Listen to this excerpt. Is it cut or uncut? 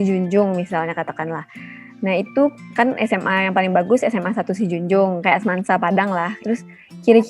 cut